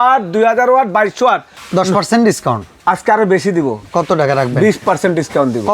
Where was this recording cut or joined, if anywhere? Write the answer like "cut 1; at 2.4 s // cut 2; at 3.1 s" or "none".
cut 1; at 1.5 s // cut 2; at 2.7 s

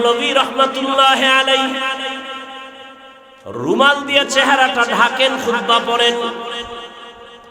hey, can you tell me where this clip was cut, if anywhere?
none

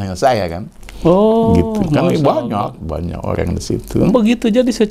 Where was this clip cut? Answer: none

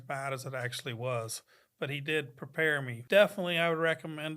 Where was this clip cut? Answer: cut 1; at 2.9 s

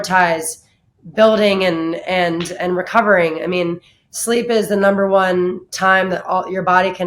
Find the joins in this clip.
none

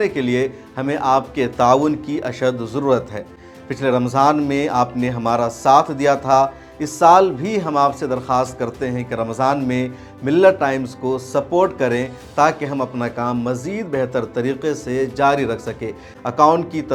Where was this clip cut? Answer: none

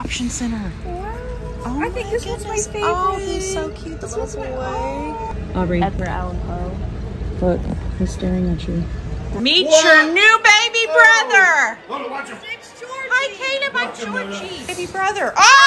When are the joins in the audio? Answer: cut 1; at 5.3 s // cut 2; at 9.4 s // cut 3; at 14.8 s

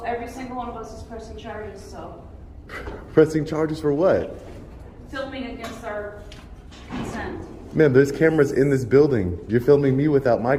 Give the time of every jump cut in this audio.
none

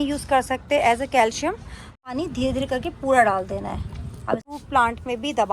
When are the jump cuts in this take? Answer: cut 1; at 2.1 s // cut 2; at 4.4 s

